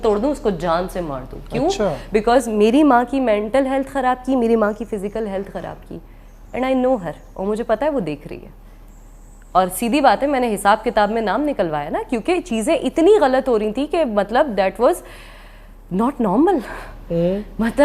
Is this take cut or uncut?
uncut